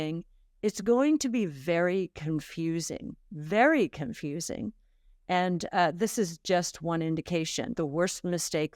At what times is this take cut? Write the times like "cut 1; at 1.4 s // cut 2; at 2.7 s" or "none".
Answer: cut 1; at 7.7 s